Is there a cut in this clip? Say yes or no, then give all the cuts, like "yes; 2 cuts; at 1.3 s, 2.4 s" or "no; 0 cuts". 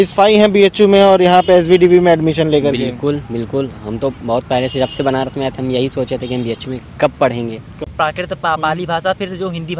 yes; 1 cut; at 7.8 s